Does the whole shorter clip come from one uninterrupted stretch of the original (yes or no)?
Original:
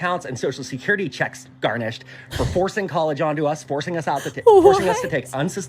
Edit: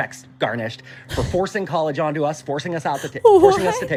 yes